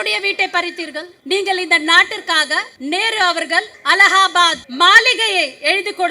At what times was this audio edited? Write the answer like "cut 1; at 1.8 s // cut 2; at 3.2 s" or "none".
cut 1; at 1.1 s // cut 2; at 2.7 s // cut 3; at 3.8 s // cut 4; at 4.6 s